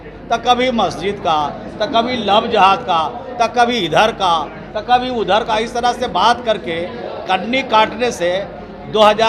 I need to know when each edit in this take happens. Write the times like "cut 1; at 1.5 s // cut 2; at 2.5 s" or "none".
none

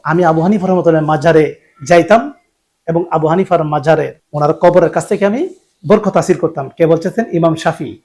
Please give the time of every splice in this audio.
cut 1; at 4.2 s

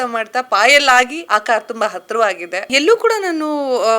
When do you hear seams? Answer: cut 1; at 1.2 s // cut 2; at 2.7 s

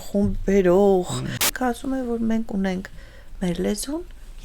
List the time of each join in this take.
cut 1; at 1.5 s

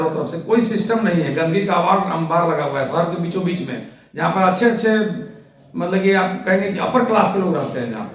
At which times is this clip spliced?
none

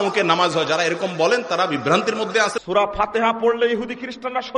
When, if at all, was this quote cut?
cut 1; at 2.6 s

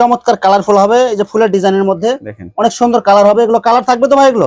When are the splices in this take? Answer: none

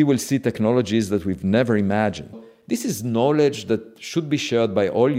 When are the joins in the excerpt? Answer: cut 1; at 2.5 s

